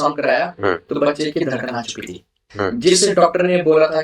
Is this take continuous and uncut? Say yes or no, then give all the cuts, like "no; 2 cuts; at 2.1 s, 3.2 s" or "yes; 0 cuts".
yes; 0 cuts